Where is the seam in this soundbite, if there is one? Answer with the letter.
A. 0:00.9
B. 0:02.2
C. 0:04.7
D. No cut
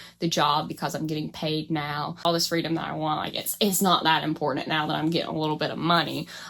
B